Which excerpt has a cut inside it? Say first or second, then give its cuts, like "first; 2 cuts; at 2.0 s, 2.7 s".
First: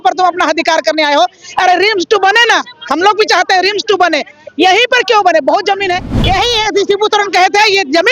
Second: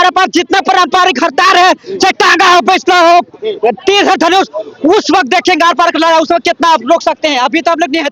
first; 1 cut; at 6.1 s